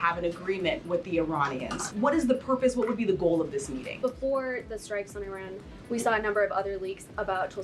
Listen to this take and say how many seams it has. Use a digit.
2